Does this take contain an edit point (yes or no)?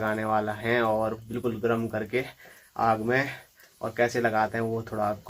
no